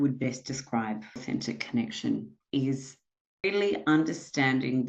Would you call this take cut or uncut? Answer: cut